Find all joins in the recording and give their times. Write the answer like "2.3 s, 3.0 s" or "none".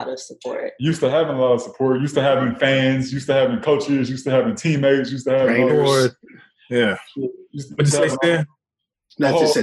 none